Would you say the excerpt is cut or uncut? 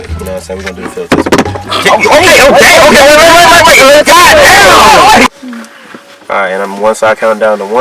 cut